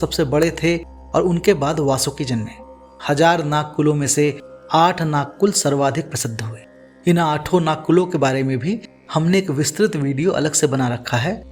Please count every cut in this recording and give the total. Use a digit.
0